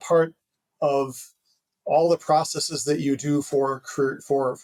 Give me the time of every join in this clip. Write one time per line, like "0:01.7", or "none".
none